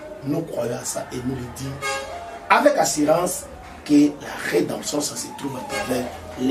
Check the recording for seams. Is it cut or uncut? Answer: uncut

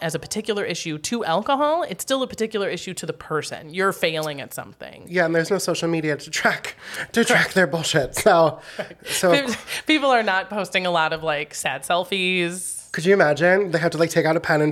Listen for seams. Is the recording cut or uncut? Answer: uncut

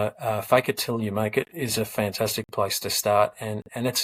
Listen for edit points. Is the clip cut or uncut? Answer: uncut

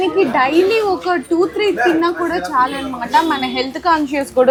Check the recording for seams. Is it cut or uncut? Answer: uncut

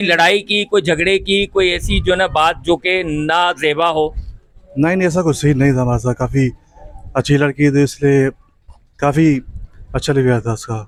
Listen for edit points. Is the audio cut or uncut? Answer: uncut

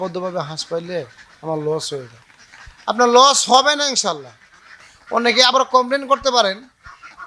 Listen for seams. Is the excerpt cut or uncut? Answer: cut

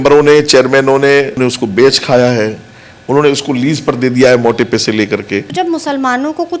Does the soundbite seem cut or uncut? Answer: cut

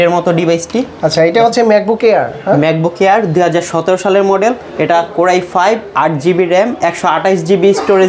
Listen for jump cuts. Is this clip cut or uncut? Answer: uncut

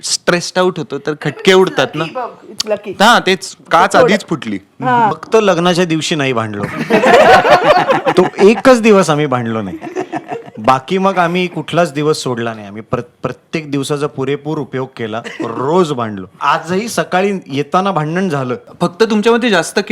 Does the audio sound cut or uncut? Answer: cut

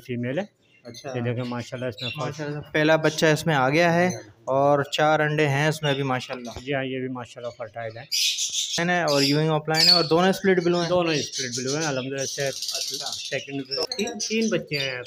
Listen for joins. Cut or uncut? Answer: cut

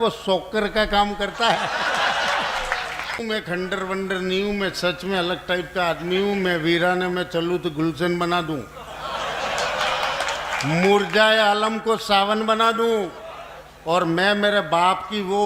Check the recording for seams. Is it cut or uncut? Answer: cut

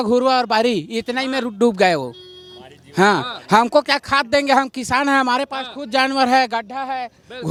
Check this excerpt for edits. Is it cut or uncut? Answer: uncut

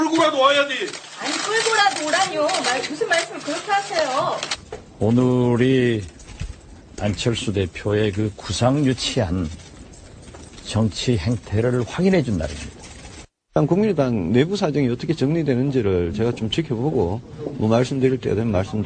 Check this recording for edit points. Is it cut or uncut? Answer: uncut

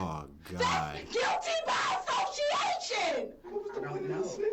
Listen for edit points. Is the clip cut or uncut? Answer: cut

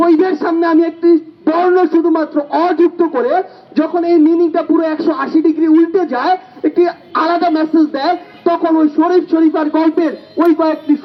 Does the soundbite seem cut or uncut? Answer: uncut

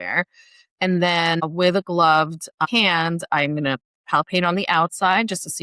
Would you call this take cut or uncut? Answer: cut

